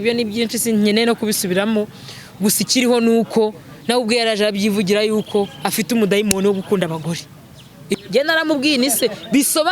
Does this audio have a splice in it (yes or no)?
yes